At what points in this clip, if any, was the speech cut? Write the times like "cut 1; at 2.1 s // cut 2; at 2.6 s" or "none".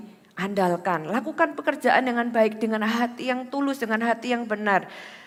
none